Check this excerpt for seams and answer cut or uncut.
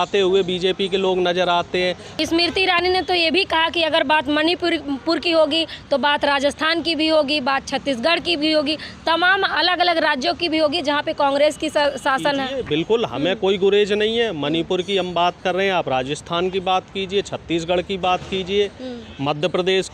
cut